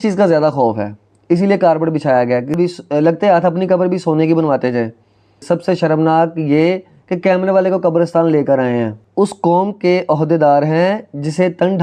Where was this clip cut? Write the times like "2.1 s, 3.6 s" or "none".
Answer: 2.6 s, 5.4 s, 9.0 s